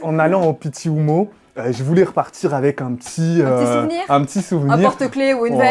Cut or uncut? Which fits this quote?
uncut